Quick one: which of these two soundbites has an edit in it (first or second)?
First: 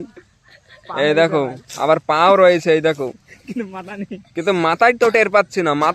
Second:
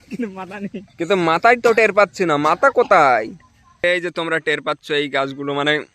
second